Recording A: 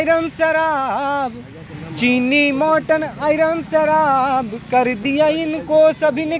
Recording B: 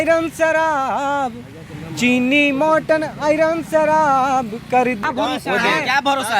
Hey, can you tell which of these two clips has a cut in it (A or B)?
B